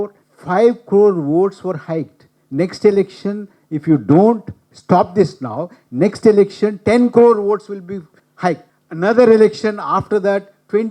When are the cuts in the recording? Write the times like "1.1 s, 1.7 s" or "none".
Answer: none